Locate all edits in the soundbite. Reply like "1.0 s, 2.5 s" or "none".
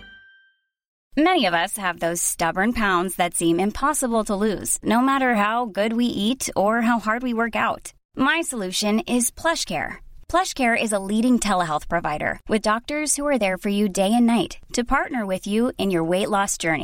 1.0 s